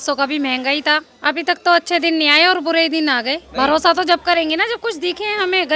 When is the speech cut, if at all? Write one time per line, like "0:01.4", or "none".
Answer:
0:01.1
0:03.4